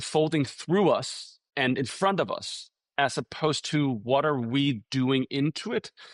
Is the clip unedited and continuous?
no; 1 cut; at 1.5 s

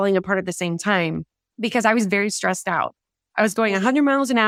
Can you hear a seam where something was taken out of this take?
no; 0 cuts

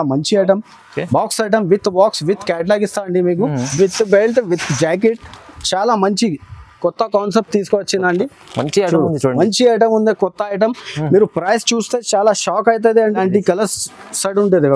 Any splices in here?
yes; 2 cuts; at 3.6 s, 13.1 s

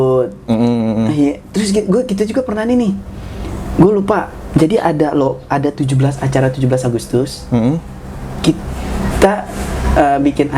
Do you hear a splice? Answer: no; 0 cuts

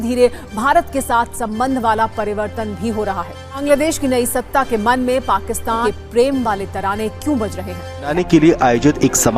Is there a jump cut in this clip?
yes; 3 cuts; at 3.4 s, 5.8 s, 8.1 s

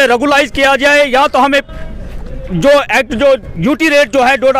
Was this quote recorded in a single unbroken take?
yes; 0 cuts

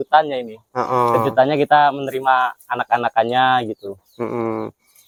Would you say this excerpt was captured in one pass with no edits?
yes; 0 cuts

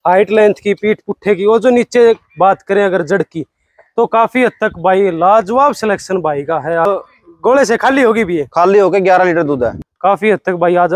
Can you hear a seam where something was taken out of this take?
yes; 2 cuts; at 6.9 s, 9.9 s

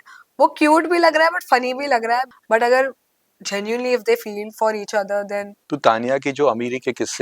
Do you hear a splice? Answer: yes; 2 cuts; at 2.3 s, 5.6 s

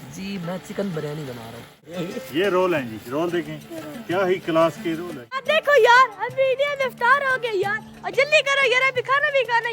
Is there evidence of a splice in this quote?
yes; 2 cuts; at 1.9 s, 5.4 s

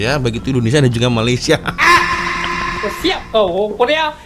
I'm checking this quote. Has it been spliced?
yes; 1 cut; at 2.8 s

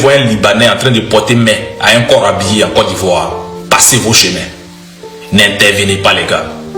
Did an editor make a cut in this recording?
no; 0 cuts

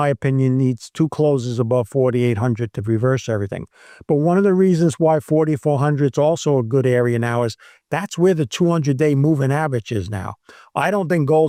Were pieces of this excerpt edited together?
no; 0 cuts

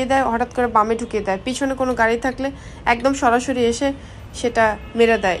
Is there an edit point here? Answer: no; 0 cuts

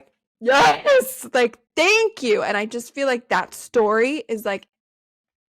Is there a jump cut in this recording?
no; 0 cuts

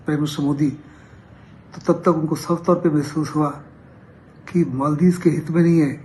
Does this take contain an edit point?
no; 0 cuts

